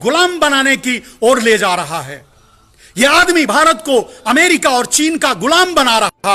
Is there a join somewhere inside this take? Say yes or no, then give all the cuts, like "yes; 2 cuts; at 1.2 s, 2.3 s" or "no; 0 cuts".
no; 0 cuts